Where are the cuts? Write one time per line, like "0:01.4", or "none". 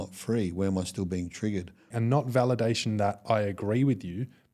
0:01.8